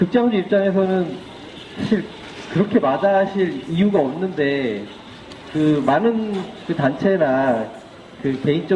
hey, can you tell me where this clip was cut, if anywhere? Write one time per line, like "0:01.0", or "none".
0:02.7

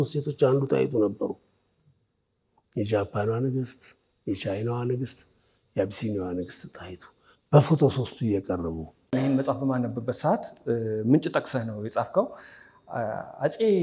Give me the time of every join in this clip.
0:09.1

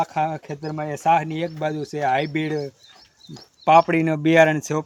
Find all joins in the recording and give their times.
none

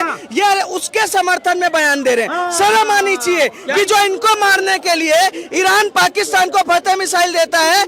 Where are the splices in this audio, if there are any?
none

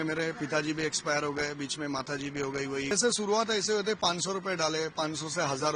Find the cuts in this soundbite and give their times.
0:02.9

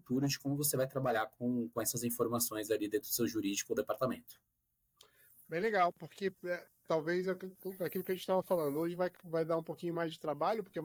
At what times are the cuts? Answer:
none

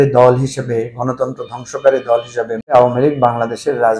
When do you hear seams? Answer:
0:02.7

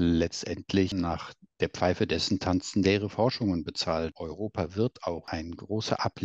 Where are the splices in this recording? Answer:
0:00.9
0:04.2
0:05.3

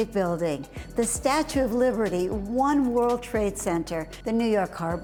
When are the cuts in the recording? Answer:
none

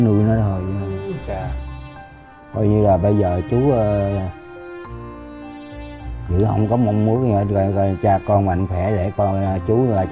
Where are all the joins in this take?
none

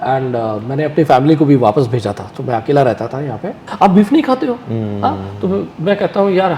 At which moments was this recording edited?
0:03.6

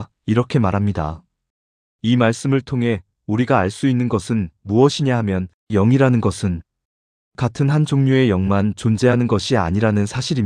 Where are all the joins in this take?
none

